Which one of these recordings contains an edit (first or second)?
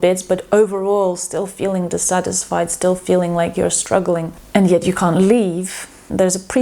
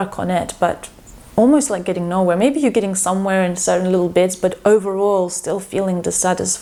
first